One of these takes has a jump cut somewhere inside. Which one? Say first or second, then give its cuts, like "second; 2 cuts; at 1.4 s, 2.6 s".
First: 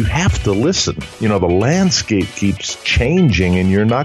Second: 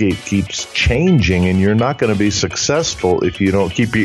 first; 1 cut; at 1.2 s